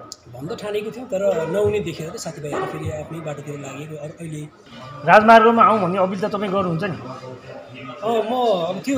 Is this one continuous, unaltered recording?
no; 1 cut; at 4.6 s

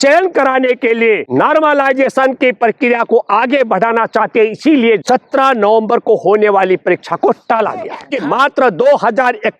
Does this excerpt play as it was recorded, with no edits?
no; 3 cuts; at 1.3 s, 5.0 s, 8.1 s

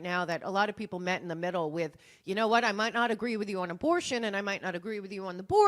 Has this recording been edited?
no; 0 cuts

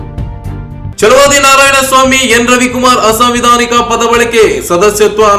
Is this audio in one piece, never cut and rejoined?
no; 1 cut; at 0.9 s

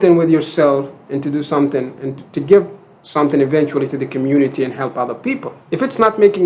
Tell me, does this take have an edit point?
yes; 1 cut; at 5.5 s

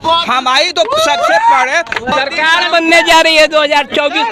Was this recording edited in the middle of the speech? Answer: yes; 1 cut; at 2.1 s

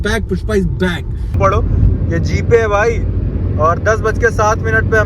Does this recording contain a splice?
yes; 1 cut; at 1.4 s

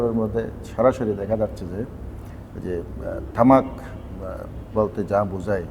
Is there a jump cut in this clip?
no; 0 cuts

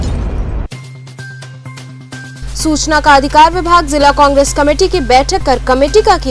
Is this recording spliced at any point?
yes; 1 cut; at 1.9 s

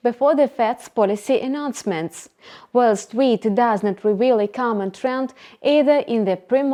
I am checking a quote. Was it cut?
no; 0 cuts

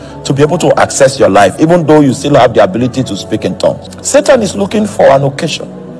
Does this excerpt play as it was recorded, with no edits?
no; 1 cut; at 3.9 s

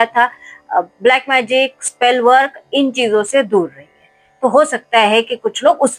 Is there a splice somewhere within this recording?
no; 0 cuts

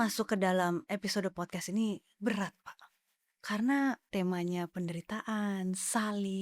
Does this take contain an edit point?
yes; 1 cut; at 4.0 s

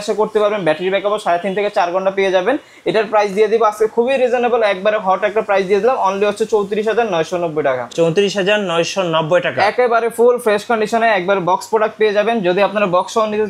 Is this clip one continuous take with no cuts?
yes; 0 cuts

